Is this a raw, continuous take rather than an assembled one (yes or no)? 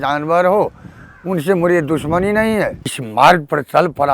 no